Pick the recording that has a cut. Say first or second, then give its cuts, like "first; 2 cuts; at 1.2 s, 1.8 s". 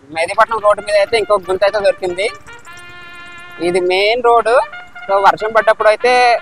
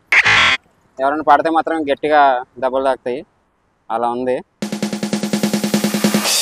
second; 1 cut; at 4.5 s